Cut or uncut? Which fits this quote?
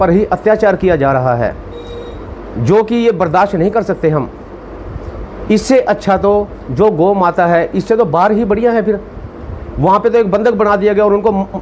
uncut